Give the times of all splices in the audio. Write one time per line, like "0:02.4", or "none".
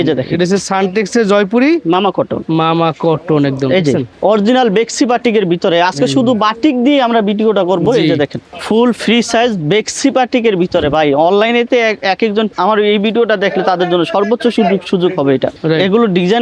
0:04.1
0:08.6
0:12.5
0:15.5